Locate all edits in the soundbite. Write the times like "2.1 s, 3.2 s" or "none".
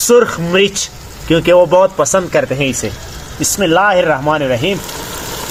none